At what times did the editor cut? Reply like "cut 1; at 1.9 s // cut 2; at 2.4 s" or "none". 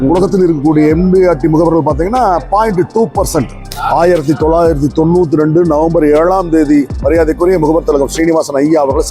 cut 1; at 3.7 s